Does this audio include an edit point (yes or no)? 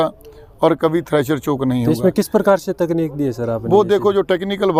no